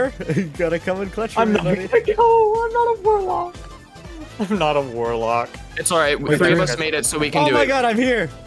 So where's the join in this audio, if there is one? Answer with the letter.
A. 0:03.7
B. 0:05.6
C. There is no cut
C